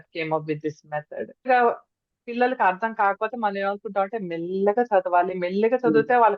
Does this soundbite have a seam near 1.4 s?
yes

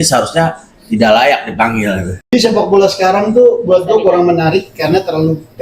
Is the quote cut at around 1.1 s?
no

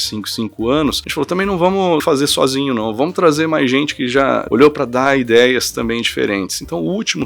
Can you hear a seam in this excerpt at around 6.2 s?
no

